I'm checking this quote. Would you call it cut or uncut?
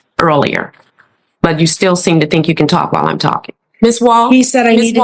cut